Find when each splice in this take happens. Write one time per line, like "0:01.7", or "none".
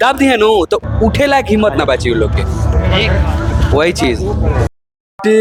none

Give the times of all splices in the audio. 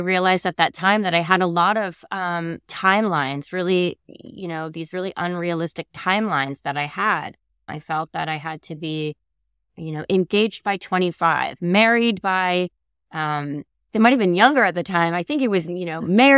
0:07.7

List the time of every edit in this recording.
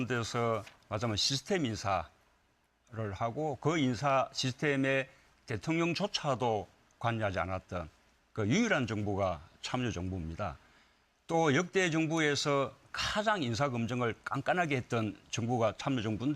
0:12.1

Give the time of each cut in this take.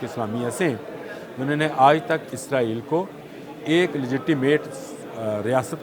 none

